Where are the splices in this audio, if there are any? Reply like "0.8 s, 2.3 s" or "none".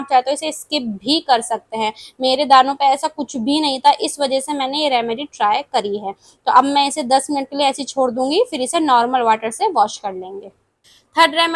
none